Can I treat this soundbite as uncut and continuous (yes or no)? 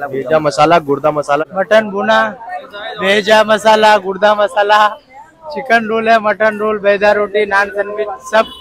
yes